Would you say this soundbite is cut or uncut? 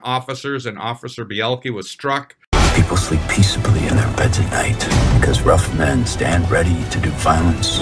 cut